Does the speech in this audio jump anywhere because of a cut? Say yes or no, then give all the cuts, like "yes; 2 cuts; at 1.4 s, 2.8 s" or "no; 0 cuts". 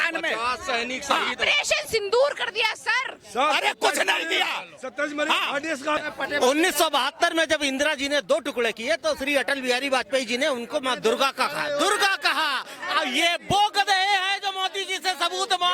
yes; 1 cut; at 6.0 s